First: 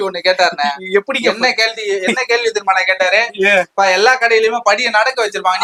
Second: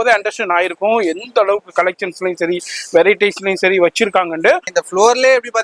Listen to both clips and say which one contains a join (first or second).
second